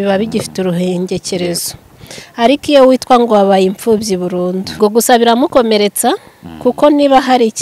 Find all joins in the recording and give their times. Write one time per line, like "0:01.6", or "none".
0:04.8